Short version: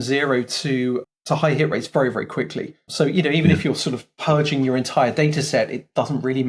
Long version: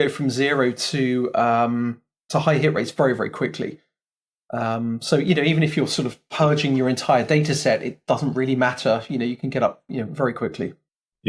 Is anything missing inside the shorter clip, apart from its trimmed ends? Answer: yes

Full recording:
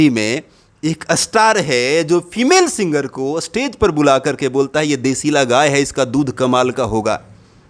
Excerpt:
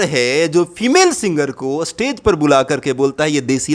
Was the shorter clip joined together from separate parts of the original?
no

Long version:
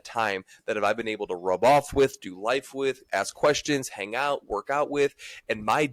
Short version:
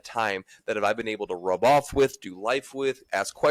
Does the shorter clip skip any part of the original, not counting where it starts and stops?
no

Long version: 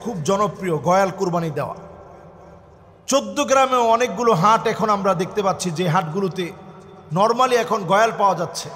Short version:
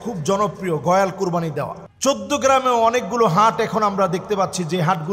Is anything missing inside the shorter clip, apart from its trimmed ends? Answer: yes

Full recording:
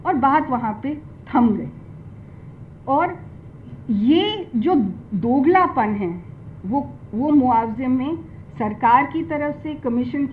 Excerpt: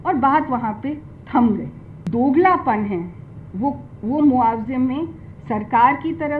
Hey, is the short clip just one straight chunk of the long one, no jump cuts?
no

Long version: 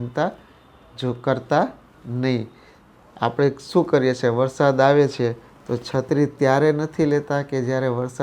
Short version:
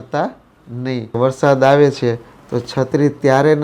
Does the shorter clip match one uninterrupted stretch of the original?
no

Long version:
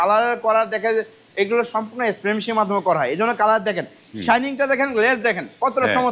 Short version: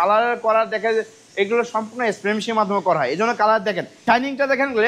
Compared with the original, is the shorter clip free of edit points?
no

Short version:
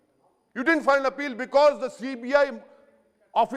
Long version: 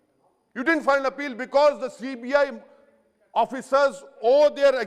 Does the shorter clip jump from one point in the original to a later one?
no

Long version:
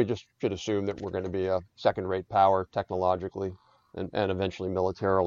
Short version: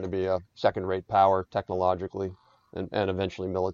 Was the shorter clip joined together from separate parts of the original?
no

